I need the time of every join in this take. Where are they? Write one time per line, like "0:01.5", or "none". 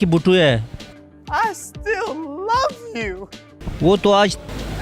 none